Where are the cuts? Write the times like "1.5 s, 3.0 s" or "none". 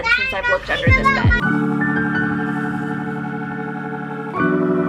none